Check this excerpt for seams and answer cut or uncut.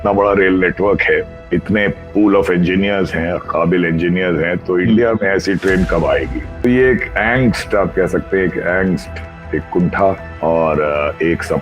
cut